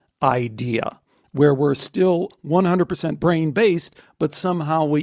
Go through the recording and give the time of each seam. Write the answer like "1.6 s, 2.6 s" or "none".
none